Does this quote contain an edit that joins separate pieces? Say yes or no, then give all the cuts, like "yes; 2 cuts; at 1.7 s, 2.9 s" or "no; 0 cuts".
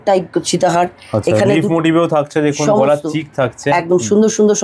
no; 0 cuts